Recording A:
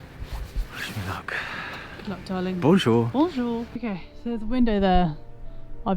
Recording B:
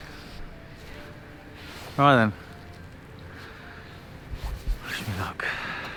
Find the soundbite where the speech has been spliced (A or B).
A